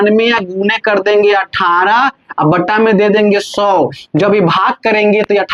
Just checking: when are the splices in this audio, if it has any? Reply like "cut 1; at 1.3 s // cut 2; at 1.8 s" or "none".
none